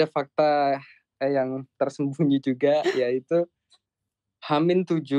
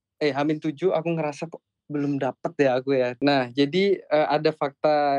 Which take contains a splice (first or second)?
second